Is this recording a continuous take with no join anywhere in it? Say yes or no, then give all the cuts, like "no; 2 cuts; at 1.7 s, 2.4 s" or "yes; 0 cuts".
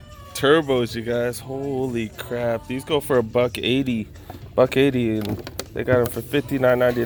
yes; 0 cuts